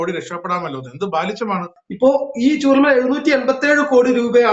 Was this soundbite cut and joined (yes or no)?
yes